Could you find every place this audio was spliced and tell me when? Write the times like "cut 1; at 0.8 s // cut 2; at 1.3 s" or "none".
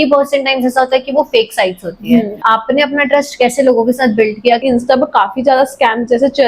cut 1; at 2.4 s // cut 2; at 4.6 s